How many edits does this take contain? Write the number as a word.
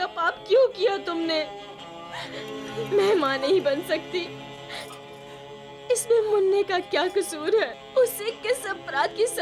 two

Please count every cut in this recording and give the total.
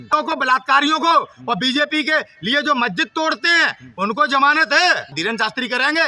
one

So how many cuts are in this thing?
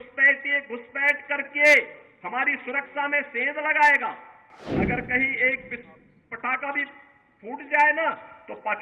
one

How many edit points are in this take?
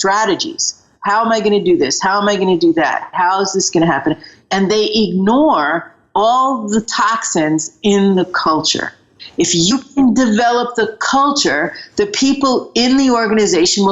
one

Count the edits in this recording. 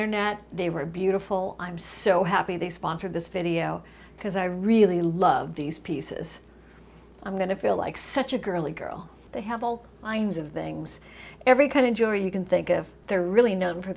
one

